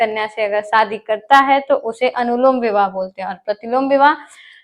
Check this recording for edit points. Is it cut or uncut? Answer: uncut